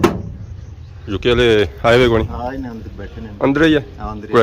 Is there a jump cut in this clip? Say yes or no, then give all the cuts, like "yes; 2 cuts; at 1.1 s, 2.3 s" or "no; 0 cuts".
yes; 1 cut; at 1.0 s